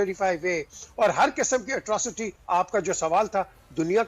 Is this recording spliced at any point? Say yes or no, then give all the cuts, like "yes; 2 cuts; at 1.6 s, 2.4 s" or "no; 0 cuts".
yes; 1 cut; at 2.3 s